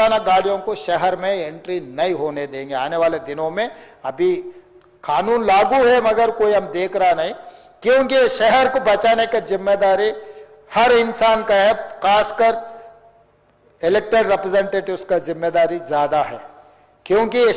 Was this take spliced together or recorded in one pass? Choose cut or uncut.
uncut